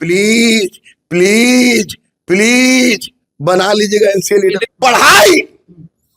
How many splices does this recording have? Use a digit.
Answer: 1